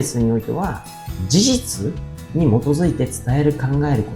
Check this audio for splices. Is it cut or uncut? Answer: uncut